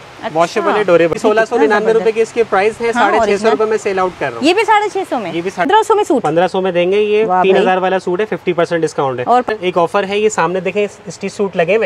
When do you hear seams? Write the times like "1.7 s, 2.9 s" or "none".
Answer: 1.2 s, 5.7 s, 9.5 s